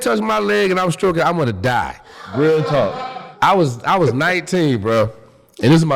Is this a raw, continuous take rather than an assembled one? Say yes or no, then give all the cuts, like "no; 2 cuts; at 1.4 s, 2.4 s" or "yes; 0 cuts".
no; 1 cut; at 3.2 s